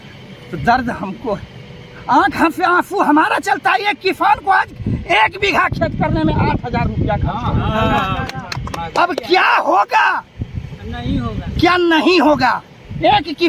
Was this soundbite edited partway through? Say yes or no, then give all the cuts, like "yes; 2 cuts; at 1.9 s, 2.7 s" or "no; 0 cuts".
no; 0 cuts